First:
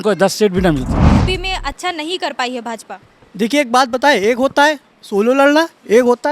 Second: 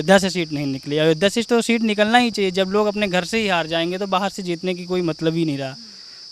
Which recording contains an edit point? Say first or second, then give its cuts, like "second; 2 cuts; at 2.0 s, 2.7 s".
first; 1 cut; at 1.1 s